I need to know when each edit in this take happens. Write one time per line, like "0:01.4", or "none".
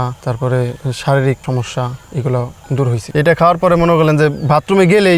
0:03.0